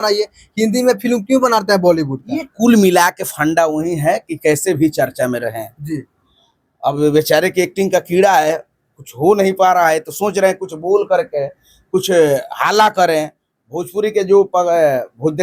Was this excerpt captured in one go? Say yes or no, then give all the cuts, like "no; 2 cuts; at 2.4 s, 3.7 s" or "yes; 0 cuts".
yes; 0 cuts